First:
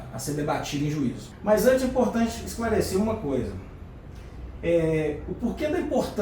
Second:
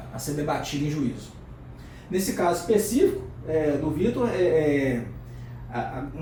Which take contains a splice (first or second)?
first